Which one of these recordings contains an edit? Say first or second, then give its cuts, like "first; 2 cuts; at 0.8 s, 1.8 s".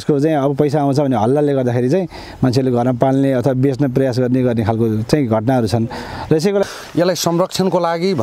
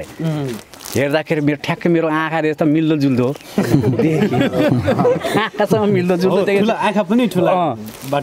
first; 1 cut; at 6.6 s